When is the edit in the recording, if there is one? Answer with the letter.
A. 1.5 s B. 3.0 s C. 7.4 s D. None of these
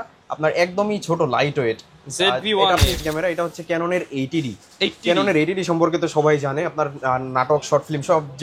B